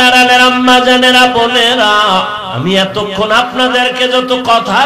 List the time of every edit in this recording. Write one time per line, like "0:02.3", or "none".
0:02.4